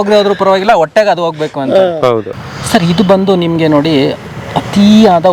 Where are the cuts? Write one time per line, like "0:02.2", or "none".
0:02.4